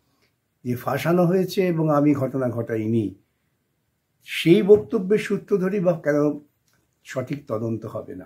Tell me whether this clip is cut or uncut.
uncut